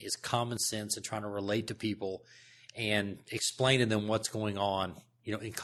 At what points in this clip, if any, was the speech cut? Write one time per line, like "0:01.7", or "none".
none